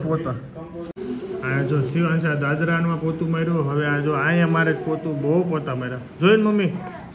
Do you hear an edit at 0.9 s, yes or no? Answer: yes